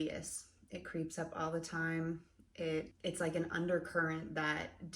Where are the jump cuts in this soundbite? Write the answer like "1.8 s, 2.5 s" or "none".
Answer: 2.9 s